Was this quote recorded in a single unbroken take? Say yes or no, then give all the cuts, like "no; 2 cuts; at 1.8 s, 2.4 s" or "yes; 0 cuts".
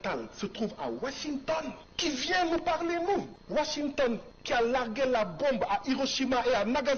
no; 3 cuts; at 1.9 s, 3.4 s, 4.3 s